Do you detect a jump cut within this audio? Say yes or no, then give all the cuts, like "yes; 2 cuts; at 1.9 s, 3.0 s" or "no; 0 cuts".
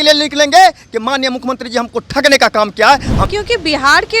yes; 1 cut; at 3.2 s